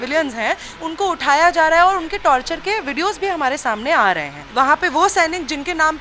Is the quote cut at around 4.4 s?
yes; 1 cut; at 4.4 s

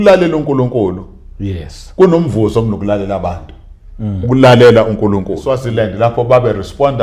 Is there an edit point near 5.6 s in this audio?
yes; 1 cut; at 5.6 s

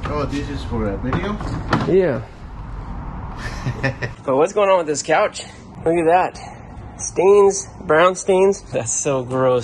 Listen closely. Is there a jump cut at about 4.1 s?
yes; 2 cuts; at 4.1 s, 8.7 s

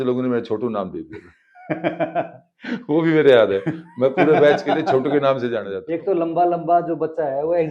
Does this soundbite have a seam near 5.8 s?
yes; 1 cut; at 5.8 s

